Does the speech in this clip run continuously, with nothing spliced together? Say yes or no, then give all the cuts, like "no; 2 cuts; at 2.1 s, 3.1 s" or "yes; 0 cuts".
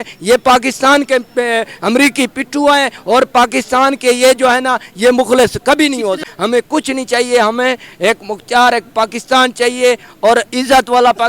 no; 1 cut; at 6.3 s